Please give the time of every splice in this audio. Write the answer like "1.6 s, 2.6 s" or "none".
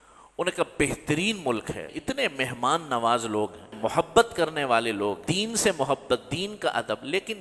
1.8 s, 3.7 s, 5.3 s